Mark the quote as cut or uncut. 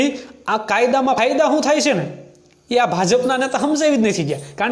cut